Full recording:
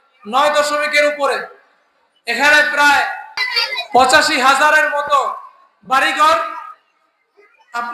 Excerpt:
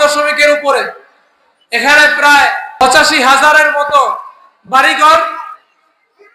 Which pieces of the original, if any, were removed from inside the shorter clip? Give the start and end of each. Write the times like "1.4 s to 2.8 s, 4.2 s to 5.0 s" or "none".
3.4 s to 4.0 s